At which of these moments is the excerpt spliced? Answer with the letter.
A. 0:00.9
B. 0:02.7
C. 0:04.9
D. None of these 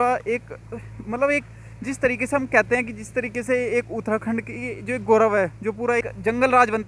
D